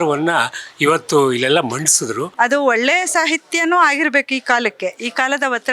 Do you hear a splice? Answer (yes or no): yes